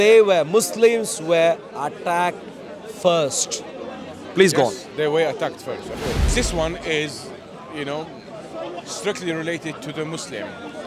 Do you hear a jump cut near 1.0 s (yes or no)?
no